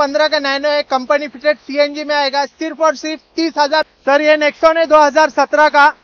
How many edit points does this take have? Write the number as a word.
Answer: one